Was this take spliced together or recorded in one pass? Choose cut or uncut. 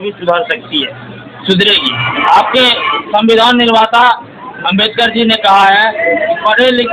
uncut